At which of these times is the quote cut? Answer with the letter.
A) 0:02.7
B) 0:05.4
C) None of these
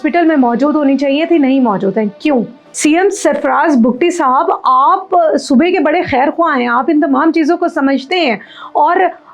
A